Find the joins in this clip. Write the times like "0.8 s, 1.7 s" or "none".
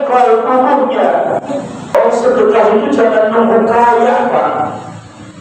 1.9 s

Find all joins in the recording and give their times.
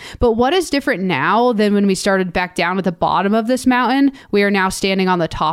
none

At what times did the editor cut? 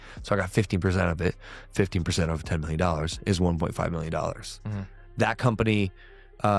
5.4 s

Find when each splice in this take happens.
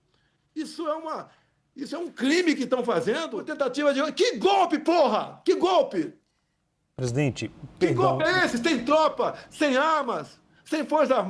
3.4 s

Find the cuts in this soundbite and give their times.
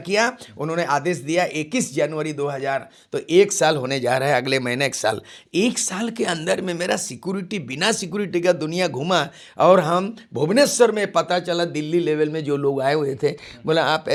none

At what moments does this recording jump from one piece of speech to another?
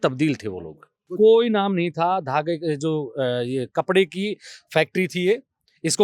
1.1 s

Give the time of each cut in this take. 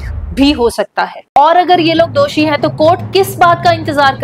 1.2 s

